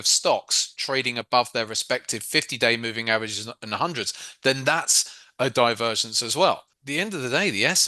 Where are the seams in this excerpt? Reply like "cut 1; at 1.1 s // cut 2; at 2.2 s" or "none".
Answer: cut 1; at 6.8 s